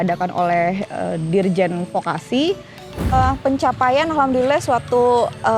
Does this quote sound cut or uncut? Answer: cut